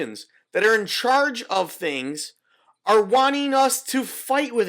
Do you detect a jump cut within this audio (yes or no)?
no